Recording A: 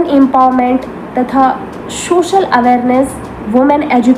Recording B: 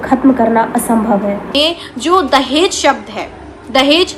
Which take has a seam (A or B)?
B